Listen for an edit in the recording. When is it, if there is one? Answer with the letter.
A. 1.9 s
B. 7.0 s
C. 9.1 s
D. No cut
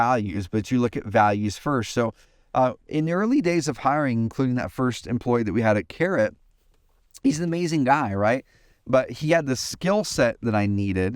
D